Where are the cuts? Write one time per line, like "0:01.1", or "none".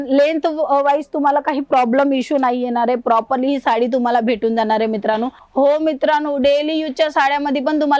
0:05.4